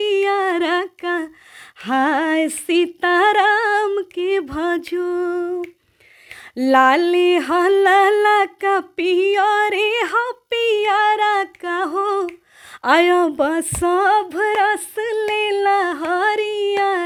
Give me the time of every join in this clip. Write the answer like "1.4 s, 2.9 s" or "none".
none